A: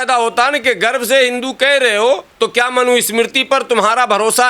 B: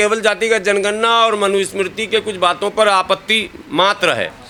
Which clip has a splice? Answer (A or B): A